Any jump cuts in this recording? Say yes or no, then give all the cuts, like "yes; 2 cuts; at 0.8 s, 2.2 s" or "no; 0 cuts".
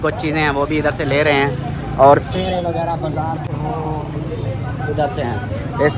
no; 0 cuts